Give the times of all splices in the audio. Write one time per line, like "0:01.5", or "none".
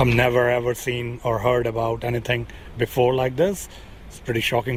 none